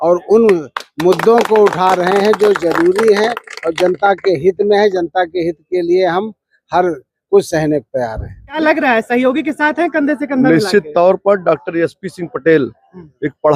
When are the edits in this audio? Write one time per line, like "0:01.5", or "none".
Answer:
0:08.6

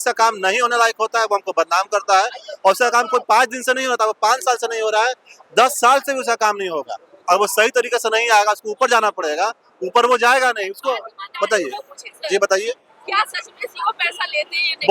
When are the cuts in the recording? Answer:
none

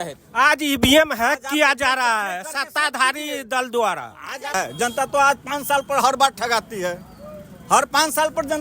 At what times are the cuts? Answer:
0:04.5

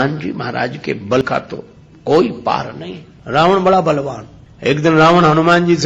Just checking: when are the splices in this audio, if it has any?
0:01.2

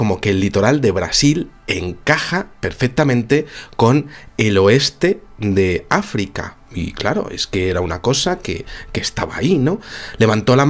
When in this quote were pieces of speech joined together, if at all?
0:07.9

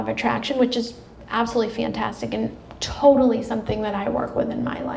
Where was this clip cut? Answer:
0:02.7

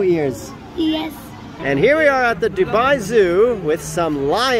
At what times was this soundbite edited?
0:01.6

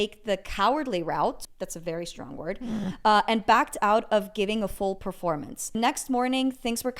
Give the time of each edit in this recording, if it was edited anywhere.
0:01.5
0:05.8

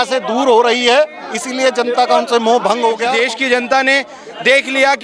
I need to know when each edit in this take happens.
0:03.1

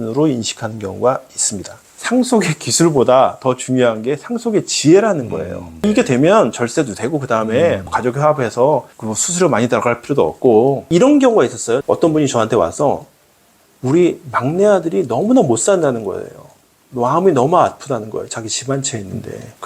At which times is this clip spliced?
0:02.0
0:05.8
0:10.8

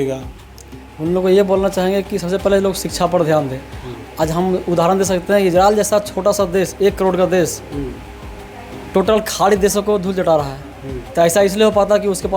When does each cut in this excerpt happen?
none

